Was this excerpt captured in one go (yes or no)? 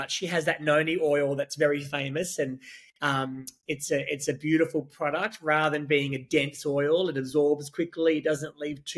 yes